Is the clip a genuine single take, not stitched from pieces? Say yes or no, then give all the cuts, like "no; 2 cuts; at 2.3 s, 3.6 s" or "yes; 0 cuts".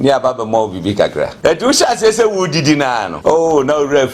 no; 2 cuts; at 1.3 s, 3.1 s